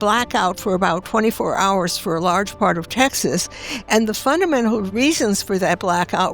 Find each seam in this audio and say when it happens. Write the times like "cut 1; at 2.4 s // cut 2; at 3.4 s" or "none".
cut 1; at 4.9 s